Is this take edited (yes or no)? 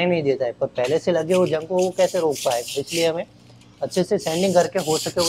no